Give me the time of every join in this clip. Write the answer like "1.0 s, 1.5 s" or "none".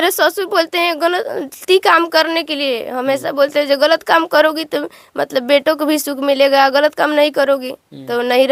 none